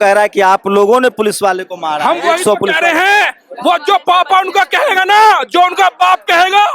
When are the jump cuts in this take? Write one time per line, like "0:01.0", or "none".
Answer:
none

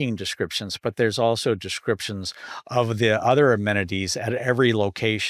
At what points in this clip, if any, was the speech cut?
none

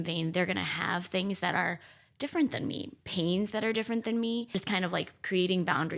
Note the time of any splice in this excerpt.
0:04.5

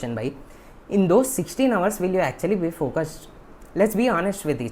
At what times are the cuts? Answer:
none

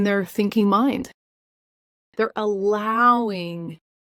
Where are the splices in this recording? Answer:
none

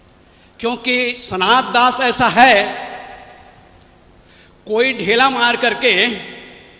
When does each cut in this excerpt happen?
0:01.2

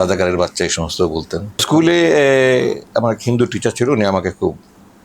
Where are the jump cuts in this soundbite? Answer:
0:01.6

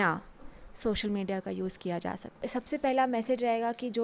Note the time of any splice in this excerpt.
0:02.4

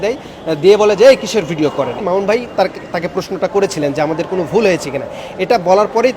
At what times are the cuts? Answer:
0:02.0

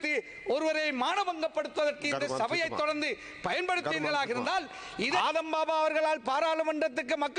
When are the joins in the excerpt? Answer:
0:05.1

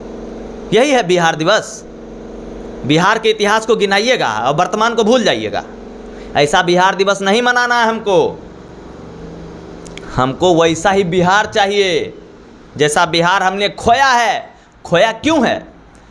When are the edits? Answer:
none

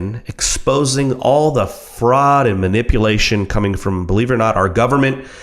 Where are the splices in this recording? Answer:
0:03.0

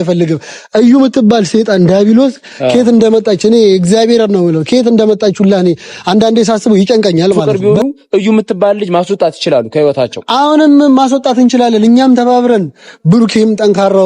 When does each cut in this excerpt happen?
0:07.5

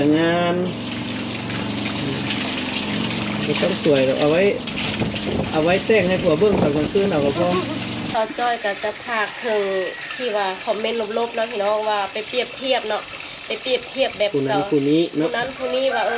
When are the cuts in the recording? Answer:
0:08.0

